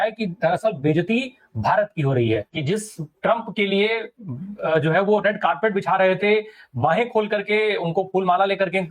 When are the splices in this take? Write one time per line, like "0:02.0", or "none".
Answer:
0:02.5